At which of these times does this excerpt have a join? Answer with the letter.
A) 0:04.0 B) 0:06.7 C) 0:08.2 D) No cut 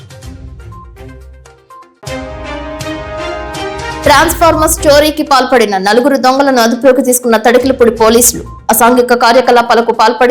A